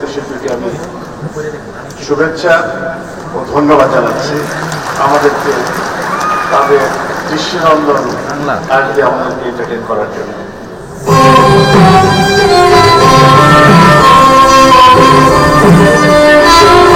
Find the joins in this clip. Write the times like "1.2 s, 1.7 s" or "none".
none